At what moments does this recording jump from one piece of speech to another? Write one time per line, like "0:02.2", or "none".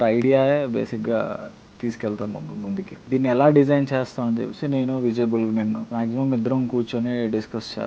0:03.0
0:05.9